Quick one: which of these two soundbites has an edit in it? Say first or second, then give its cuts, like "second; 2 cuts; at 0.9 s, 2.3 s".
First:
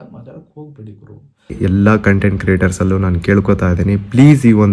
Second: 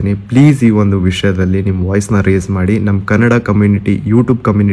first; 1 cut; at 1.6 s